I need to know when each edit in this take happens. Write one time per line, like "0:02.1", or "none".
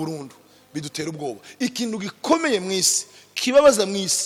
none